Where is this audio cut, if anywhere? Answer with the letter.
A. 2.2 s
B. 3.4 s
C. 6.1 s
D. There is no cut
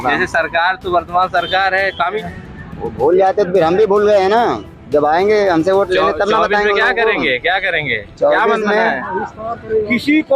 A